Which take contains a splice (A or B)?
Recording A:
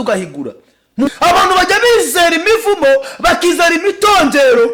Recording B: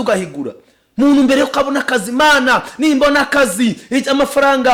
A